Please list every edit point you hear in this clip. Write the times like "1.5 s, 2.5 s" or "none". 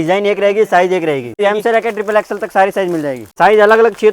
1.4 s, 3.3 s